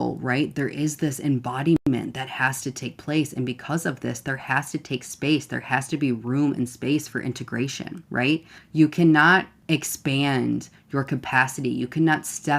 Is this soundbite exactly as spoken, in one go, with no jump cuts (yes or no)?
no